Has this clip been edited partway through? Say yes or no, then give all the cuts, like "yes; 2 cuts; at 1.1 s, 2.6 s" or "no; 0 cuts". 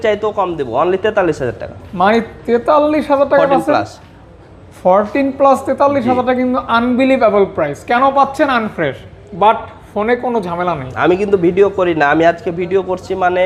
no; 0 cuts